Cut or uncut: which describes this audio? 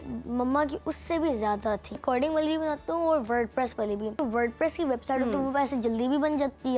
cut